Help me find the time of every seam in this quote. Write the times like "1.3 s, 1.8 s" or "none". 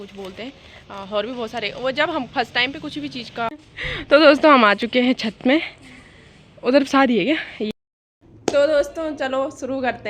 3.5 s, 7.7 s